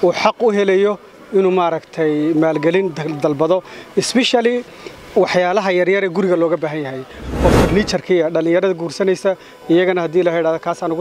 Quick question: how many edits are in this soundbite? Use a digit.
1